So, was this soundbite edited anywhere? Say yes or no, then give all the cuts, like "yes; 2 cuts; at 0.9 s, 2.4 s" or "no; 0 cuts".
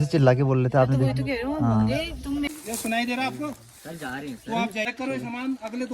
yes; 2 cuts; at 2.5 s, 4.9 s